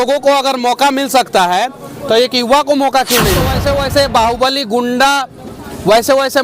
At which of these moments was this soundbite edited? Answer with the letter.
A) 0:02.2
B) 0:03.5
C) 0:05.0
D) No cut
B